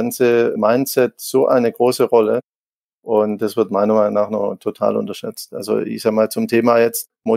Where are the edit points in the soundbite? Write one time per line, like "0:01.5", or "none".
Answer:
none